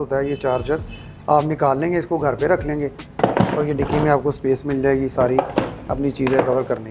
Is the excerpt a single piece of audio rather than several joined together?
yes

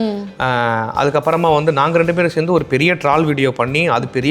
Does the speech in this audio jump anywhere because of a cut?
no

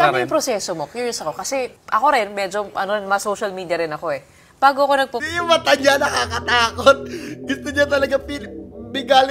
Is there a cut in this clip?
yes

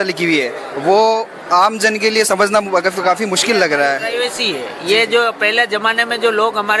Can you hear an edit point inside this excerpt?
no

